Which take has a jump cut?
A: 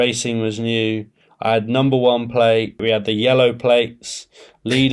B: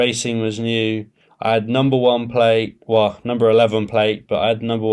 A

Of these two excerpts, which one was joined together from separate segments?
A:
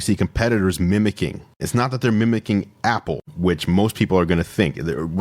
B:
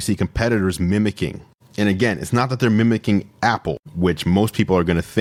A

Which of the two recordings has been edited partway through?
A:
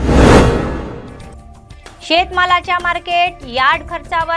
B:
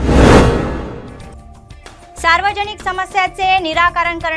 B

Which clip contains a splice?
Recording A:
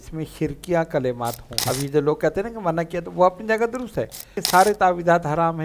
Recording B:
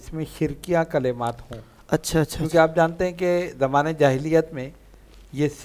A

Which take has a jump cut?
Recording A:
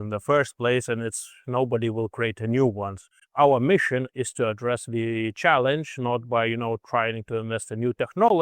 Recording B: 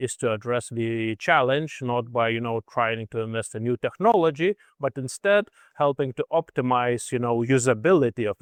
A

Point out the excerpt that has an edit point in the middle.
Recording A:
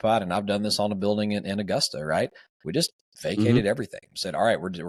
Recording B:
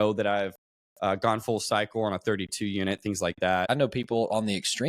B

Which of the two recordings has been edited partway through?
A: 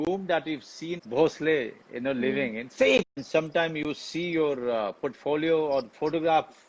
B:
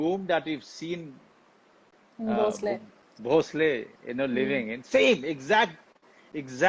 A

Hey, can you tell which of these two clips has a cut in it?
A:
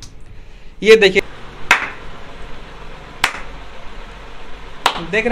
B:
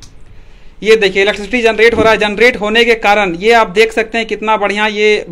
A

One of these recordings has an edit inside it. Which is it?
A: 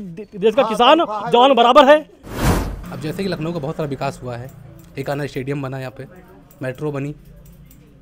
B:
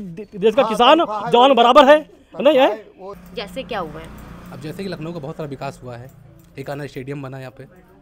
A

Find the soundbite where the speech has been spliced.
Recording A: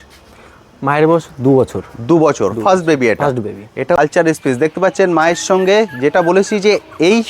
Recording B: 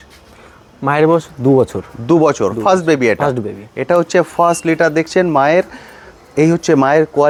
A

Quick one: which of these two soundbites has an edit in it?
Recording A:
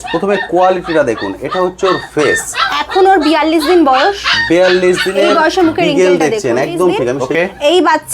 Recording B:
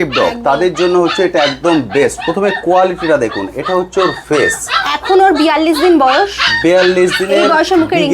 A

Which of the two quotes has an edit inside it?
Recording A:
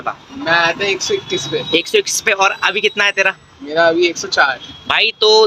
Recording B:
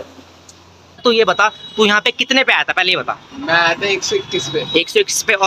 B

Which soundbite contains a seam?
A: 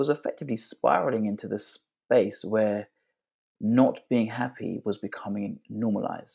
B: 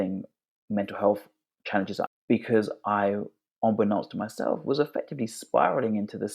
B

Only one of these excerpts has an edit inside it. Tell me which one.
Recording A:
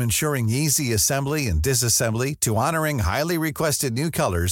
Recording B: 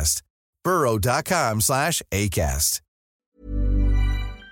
B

